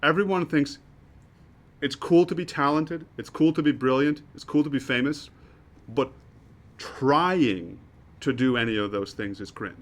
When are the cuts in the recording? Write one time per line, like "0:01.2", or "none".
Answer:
none